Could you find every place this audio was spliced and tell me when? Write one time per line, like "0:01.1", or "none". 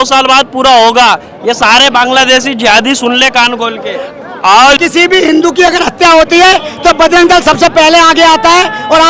0:04.8